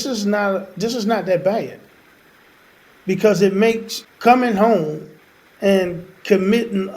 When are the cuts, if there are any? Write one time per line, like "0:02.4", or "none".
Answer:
0:03.9